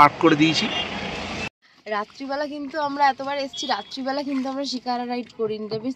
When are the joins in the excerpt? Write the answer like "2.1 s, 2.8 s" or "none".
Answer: 1.8 s